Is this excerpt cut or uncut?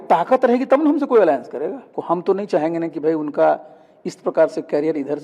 cut